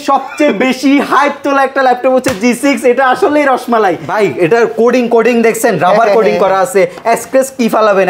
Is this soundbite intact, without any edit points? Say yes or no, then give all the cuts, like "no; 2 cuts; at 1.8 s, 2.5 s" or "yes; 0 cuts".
no; 1 cut; at 4.0 s